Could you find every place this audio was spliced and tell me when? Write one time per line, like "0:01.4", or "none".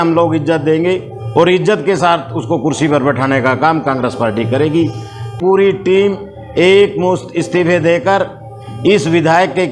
0:05.3